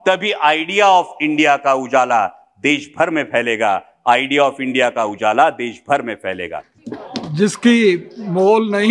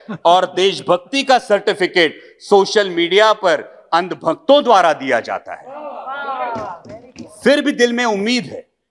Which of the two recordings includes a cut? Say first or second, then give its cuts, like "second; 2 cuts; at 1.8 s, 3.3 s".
first; 1 cut; at 6.6 s